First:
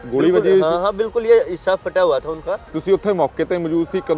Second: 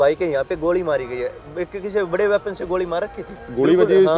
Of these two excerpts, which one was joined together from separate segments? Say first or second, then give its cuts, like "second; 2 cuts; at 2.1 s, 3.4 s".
first; 1 cut; at 2.7 s